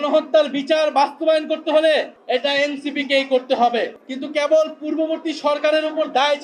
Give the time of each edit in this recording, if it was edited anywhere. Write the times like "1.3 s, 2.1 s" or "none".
3.9 s